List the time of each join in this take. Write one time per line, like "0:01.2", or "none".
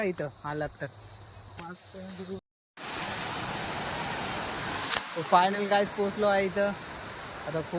0:02.4